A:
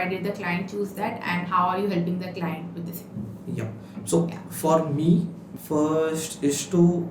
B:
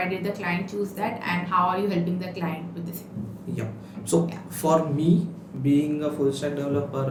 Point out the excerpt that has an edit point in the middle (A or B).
A